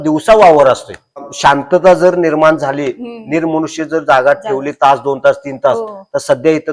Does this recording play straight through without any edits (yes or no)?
no